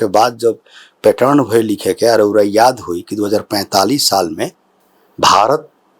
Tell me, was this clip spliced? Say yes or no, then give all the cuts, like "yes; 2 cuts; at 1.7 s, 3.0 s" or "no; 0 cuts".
no; 0 cuts